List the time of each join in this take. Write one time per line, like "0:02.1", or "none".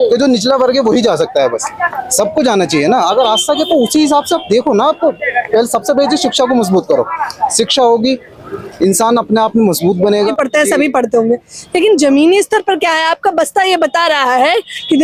0:10.3